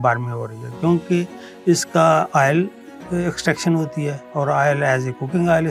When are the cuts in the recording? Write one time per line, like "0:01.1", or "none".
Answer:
none

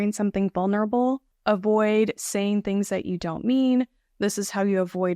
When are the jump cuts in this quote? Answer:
0:01.3

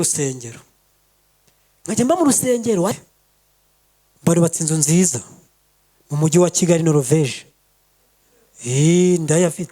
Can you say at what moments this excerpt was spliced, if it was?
0:02.9

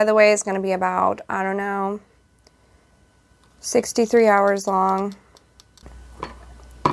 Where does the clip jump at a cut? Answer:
0:05.9

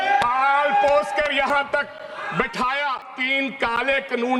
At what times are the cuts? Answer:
0:03.2

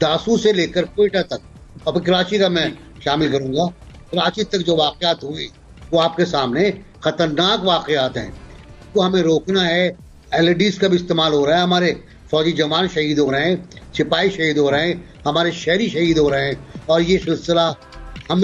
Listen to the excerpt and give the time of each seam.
none

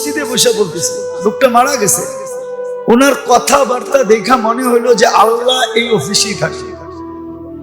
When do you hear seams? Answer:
0:06.5

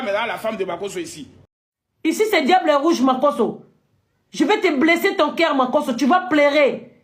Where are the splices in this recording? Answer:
0:01.3

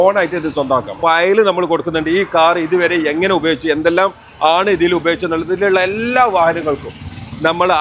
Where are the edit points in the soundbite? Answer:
0:01.0

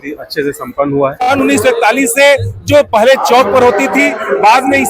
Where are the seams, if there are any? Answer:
0:01.4

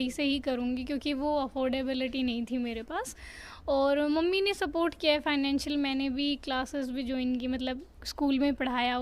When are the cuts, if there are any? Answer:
none

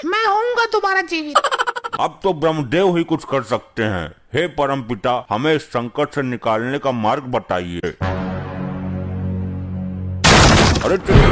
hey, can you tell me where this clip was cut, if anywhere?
0:01.9
0:07.9

